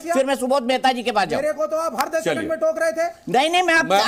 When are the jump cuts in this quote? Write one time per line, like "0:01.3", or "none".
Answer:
none